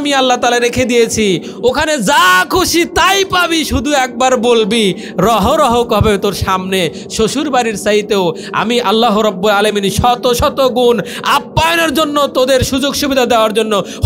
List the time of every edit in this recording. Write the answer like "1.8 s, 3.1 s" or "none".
none